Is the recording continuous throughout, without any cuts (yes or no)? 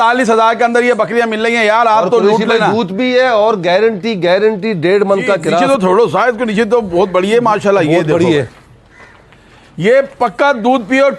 no